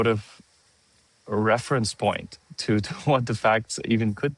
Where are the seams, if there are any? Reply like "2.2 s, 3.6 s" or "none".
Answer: none